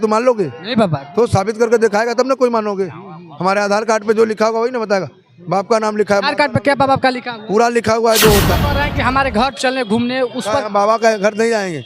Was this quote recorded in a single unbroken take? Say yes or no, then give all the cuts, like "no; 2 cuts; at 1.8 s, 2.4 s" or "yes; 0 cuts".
no; 1 cut; at 8.5 s